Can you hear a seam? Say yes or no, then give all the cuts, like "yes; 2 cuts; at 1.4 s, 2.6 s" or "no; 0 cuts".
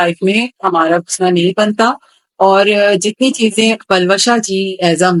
no; 0 cuts